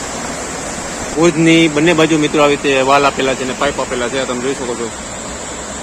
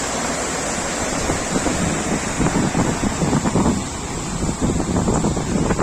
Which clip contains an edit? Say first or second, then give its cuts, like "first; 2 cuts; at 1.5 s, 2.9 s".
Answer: first; 1 cut; at 1.1 s